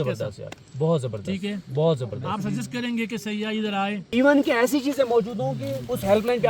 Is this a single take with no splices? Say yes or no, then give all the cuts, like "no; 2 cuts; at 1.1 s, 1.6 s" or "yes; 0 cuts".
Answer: no; 1 cut; at 4.0 s